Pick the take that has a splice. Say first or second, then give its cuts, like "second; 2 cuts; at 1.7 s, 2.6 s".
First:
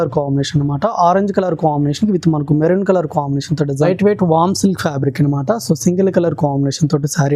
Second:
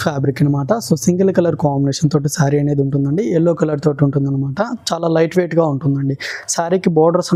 first; 1 cut; at 3.9 s